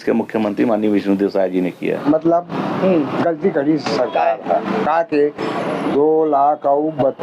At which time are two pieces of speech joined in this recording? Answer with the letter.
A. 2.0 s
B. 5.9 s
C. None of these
A